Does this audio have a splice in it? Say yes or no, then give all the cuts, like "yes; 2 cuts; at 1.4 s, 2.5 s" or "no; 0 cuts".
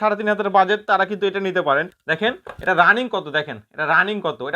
yes; 1 cut; at 1.9 s